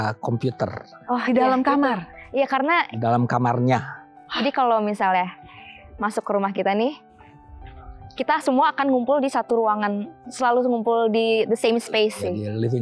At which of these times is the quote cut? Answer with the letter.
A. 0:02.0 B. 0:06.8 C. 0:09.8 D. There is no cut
D